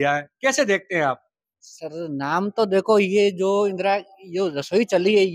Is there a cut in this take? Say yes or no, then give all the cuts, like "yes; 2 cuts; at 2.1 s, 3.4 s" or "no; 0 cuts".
no; 0 cuts